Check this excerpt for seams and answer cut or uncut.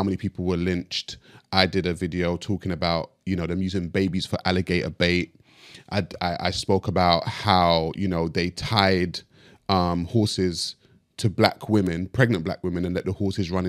uncut